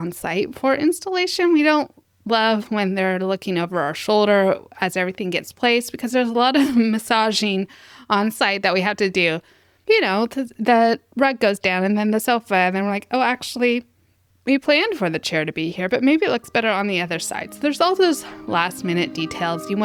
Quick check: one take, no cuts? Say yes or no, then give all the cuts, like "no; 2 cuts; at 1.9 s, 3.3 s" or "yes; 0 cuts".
yes; 0 cuts